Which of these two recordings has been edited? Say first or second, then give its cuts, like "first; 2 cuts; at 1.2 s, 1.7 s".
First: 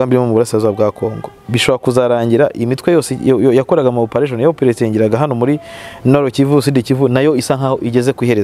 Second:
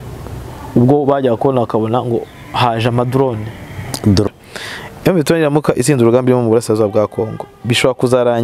second; 1 cut; at 4.3 s